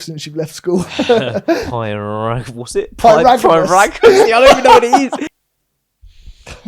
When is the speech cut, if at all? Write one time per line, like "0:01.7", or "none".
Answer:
0:05.2